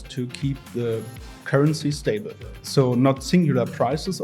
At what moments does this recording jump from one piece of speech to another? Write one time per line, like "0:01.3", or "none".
0:02.6